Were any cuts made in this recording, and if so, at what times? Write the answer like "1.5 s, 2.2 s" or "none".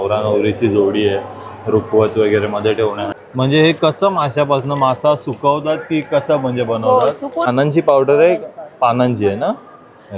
3.1 s, 7.5 s